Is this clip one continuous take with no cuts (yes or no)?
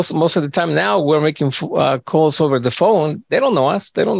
yes